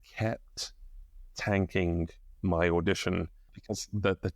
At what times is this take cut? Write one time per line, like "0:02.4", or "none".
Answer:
0:03.4